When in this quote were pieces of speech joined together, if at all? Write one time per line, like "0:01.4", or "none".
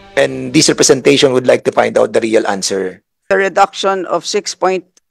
0:03.3